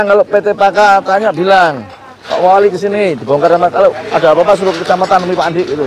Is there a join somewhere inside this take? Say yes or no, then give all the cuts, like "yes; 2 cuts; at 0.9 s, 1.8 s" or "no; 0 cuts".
no; 0 cuts